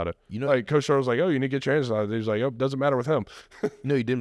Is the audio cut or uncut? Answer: uncut